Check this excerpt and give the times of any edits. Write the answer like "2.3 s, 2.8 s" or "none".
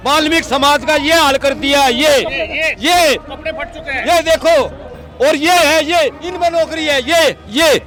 none